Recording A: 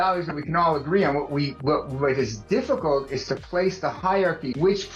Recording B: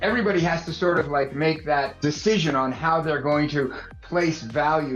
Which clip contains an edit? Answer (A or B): B